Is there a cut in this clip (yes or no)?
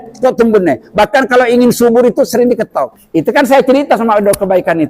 yes